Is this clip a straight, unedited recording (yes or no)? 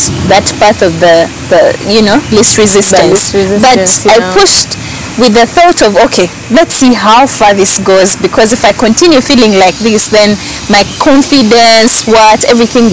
yes